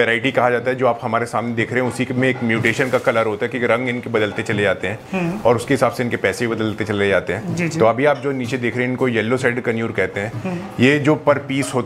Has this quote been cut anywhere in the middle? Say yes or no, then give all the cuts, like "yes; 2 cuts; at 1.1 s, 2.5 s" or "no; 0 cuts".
no; 0 cuts